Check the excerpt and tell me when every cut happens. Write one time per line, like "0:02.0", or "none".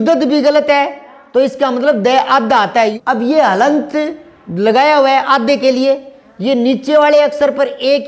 0:03.0